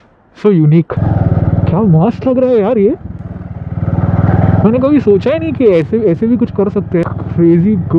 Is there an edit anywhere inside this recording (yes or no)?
yes